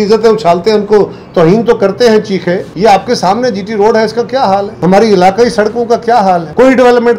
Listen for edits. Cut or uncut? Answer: uncut